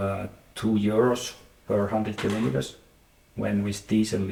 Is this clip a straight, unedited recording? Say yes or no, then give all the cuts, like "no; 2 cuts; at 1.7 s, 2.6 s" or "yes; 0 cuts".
yes; 0 cuts